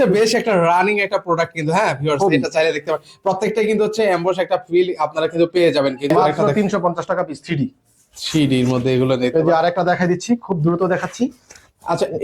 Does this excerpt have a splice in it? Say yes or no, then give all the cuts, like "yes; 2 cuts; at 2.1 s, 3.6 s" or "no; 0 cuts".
yes; 1 cut; at 6.4 s